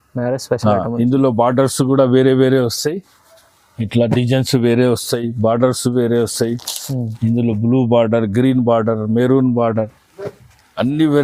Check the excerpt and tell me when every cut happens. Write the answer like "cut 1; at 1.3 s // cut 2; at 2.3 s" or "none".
none

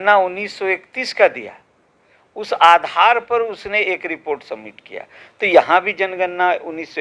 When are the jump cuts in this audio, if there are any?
none

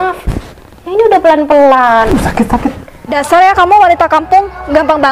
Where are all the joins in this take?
cut 1; at 3.1 s

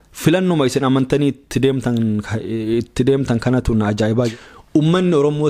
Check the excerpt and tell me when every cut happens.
cut 1; at 4.3 s

